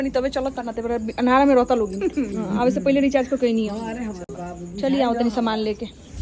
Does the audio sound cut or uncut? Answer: uncut